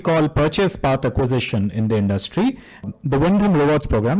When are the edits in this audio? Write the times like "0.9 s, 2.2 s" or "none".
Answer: 2.8 s